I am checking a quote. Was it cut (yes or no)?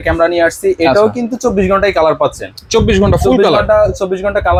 no